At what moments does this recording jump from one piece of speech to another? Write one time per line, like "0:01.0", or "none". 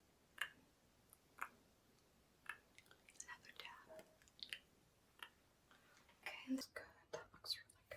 0:06.6